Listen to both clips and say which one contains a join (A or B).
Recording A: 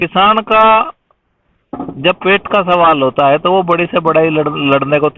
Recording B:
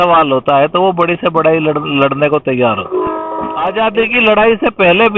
B